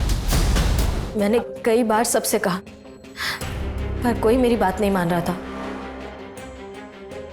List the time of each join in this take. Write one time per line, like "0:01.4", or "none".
0:01.0